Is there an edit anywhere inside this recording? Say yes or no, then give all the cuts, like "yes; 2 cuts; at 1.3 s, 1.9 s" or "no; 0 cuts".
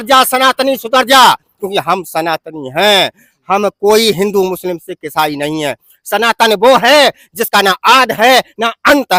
no; 0 cuts